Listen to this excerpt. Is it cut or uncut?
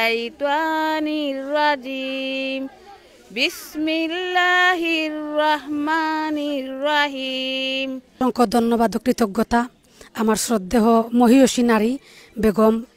cut